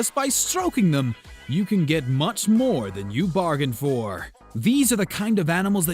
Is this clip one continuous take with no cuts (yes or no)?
no